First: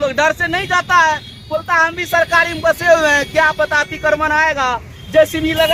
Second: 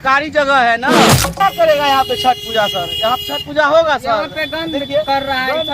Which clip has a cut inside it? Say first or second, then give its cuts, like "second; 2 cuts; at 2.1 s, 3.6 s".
second; 1 cut; at 1.4 s